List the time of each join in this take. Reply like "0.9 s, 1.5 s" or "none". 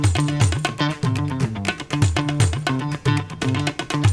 none